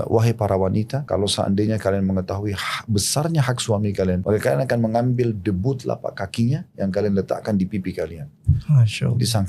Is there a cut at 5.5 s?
no; 2 cuts; at 1.0 s, 4.2 s

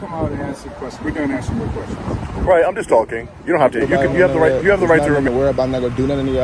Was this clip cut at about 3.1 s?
no; 1 cut; at 5.1 s

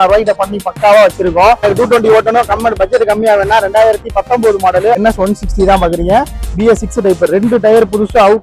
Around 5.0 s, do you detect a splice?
yes; 2 cuts; at 1.6 s, 5.0 s

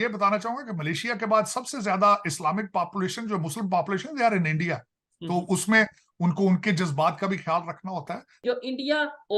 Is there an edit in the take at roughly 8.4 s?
yes; 1 cut; at 8.4 s

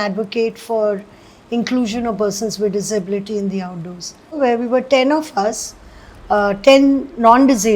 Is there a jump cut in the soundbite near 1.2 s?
no; 1 cut; at 4.4 s

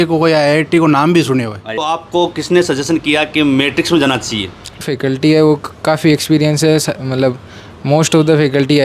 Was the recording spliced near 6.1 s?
no; 2 cuts; at 1.7 s, 4.8 s

